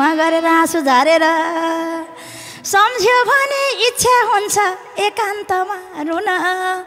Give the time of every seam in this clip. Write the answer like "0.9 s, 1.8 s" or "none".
none